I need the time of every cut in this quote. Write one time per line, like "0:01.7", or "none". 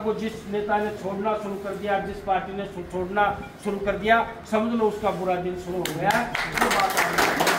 none